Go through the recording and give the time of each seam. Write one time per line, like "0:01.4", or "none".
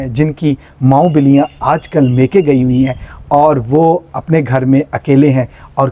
none